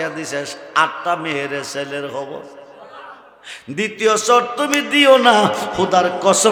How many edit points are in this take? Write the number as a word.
zero